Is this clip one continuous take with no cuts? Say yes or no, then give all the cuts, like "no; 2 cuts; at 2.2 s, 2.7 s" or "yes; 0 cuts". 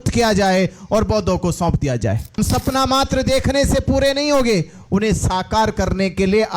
no; 1 cut; at 2.4 s